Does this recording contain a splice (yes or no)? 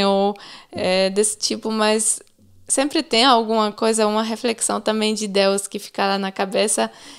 no